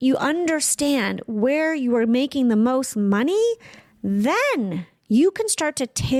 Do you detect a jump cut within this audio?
no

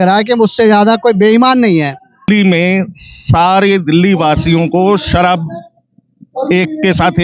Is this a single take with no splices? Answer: no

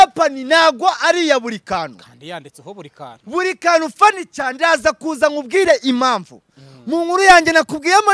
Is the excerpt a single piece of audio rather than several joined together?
yes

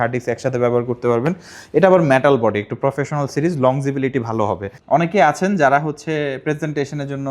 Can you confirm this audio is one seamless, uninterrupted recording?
no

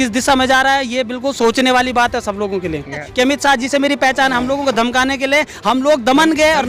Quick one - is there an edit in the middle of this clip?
yes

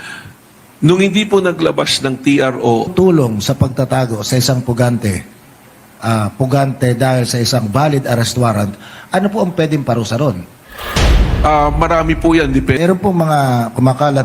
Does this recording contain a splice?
yes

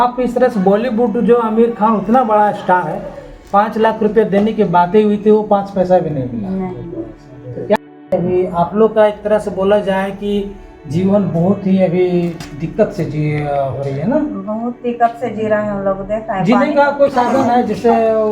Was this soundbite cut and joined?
yes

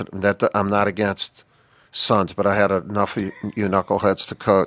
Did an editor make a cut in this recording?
no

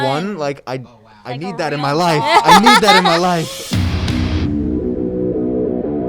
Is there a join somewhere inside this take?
yes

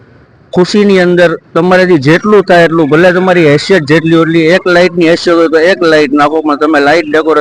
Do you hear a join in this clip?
no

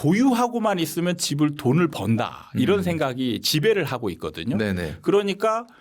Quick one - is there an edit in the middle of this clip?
no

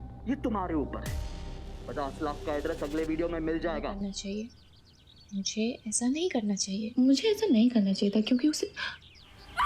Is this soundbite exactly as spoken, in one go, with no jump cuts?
no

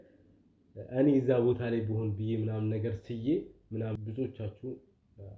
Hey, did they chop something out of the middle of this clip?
yes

